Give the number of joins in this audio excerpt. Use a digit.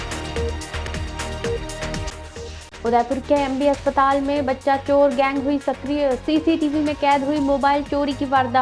1